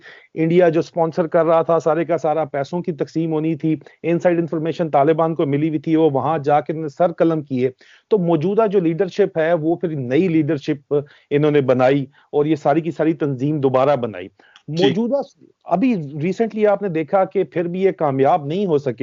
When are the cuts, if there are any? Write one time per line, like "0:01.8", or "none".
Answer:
none